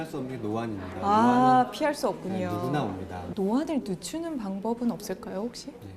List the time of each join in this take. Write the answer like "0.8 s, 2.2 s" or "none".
3.2 s